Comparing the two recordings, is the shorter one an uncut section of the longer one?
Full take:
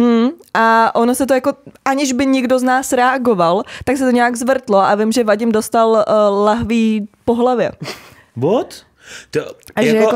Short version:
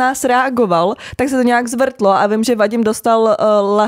yes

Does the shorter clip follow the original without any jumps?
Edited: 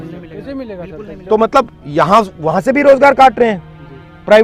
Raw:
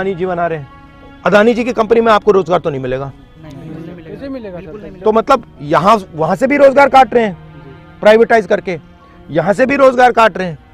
yes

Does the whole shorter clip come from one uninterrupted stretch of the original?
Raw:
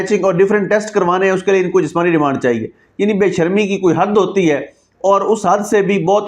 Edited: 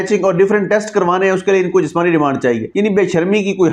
no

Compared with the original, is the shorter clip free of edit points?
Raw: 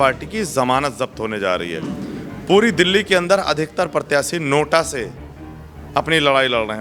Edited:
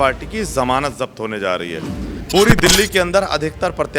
no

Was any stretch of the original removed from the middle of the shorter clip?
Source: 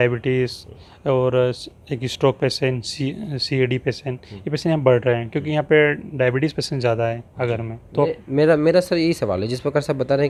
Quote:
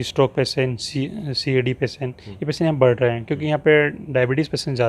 no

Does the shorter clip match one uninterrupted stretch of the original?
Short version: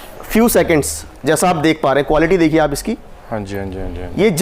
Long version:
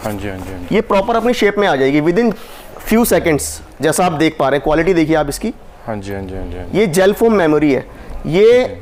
yes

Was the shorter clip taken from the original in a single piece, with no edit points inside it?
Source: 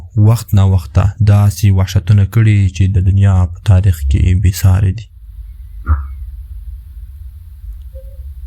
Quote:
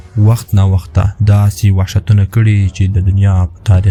yes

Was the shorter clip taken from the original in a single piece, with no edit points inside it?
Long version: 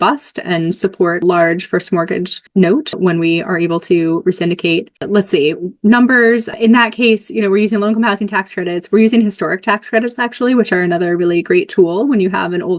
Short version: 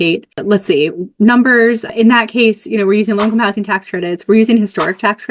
yes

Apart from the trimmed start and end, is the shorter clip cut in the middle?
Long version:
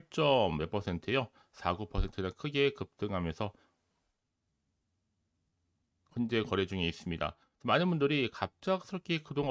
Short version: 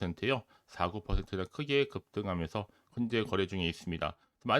yes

